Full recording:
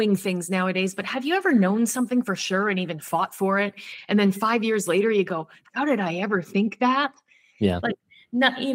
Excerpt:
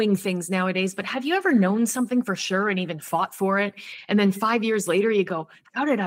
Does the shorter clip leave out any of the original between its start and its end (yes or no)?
no